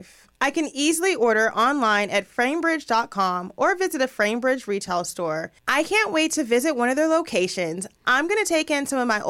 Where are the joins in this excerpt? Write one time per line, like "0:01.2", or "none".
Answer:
0:05.6